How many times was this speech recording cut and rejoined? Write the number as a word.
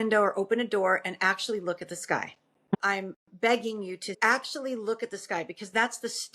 two